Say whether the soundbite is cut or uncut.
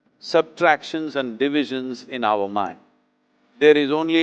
uncut